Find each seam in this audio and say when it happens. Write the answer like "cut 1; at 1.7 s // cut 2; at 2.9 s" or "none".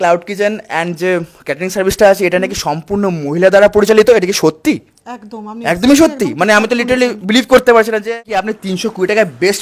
cut 1; at 8.5 s